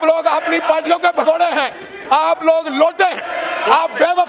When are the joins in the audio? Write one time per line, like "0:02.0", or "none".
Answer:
none